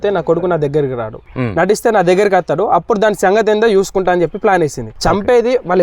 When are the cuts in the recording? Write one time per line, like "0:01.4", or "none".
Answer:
0:01.2
0:04.9